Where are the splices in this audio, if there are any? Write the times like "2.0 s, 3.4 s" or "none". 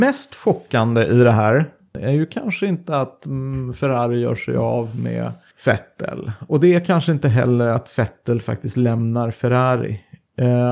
2.0 s, 5.4 s